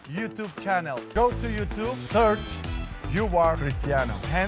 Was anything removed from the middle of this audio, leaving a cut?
yes; 1 cut; at 1.1 s

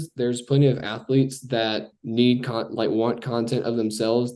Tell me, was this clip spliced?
yes; 1 cut; at 2.0 s

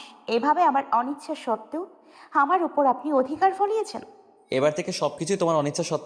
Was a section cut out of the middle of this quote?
no; 0 cuts

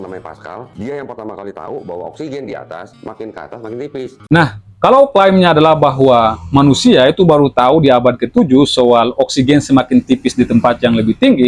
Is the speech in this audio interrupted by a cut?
yes; 1 cut; at 4.2 s

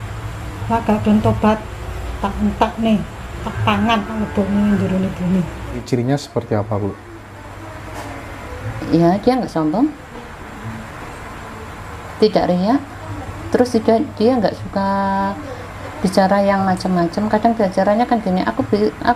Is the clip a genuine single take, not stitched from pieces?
no; 1 cut; at 5.8 s

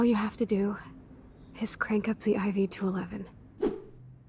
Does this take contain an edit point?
yes; 1 cut; at 3.4 s

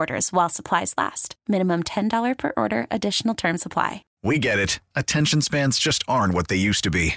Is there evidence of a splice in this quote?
yes; 1 cut; at 4.1 s

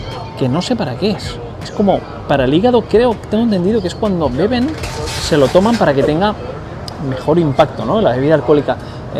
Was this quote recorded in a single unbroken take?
yes; 0 cuts

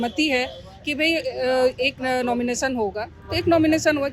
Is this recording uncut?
yes; 0 cuts

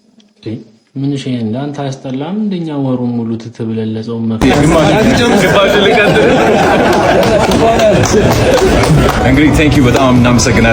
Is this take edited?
yes; 1 cut; at 4.3 s

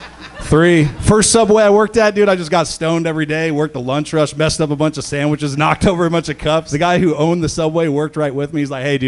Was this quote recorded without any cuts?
no; 2 cuts; at 1.0 s, 6.7 s

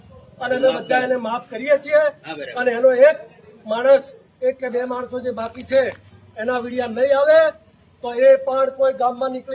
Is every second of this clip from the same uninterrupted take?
yes; 0 cuts

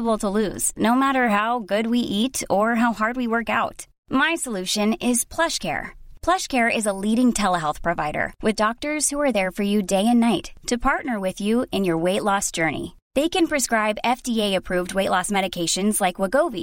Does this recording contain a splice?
no; 0 cuts

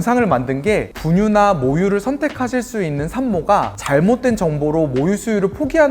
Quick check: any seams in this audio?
yes; 1 cut; at 0.9 s

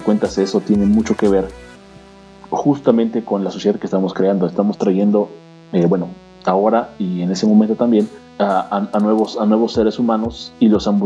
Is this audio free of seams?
no; 1 cut; at 8.2 s

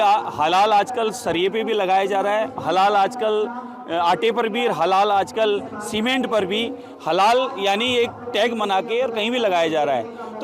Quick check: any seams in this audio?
no; 0 cuts

